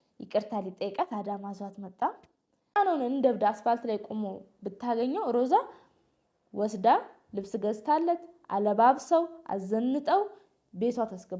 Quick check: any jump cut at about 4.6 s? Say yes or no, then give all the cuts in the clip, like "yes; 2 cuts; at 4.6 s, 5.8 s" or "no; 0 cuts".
no; 1 cut; at 2.7 s